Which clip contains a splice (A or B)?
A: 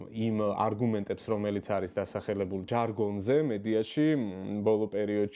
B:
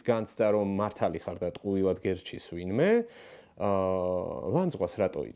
A